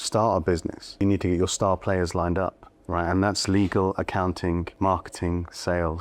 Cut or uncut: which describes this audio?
cut